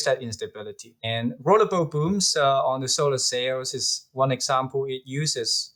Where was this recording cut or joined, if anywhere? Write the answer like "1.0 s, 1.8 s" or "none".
none